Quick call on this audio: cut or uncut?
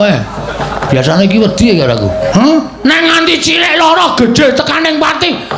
cut